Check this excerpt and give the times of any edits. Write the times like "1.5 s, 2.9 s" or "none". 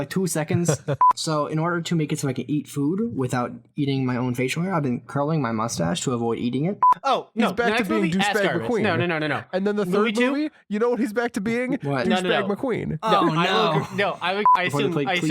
1.0 s, 6.9 s, 14.5 s